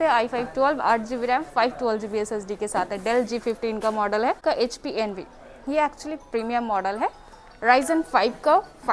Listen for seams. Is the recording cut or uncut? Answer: cut